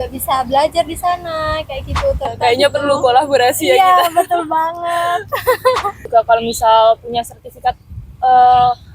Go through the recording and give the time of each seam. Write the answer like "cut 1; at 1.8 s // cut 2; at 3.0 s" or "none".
cut 1; at 2.3 s // cut 2; at 6.0 s